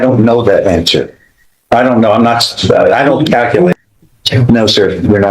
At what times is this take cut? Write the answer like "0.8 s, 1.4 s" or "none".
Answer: 3.7 s